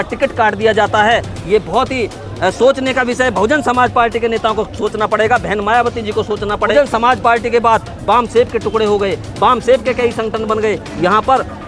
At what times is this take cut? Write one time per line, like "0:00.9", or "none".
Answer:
0:06.7

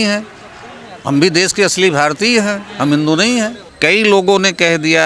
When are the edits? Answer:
0:03.6

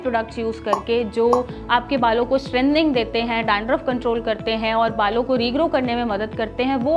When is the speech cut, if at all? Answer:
none

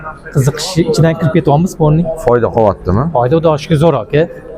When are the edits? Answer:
none

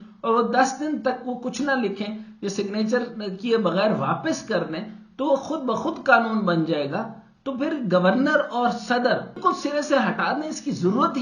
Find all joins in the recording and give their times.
0:09.4

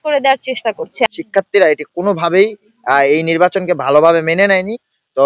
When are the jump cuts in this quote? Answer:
0:01.1

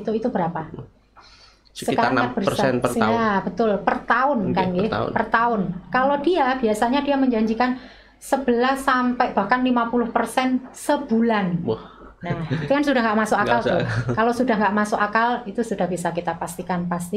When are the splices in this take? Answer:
none

